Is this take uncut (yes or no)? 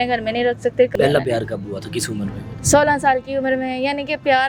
no